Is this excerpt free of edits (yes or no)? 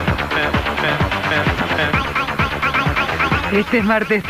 yes